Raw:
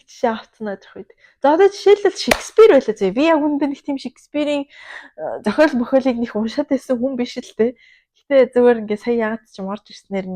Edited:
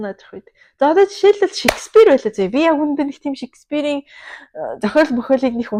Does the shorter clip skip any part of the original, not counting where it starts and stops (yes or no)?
no